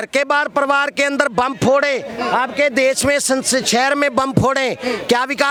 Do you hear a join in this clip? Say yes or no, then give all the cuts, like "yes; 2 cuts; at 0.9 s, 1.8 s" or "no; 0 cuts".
no; 0 cuts